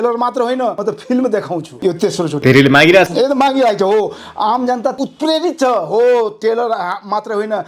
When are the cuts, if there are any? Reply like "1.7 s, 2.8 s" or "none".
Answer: 0.8 s, 1.7 s, 4.9 s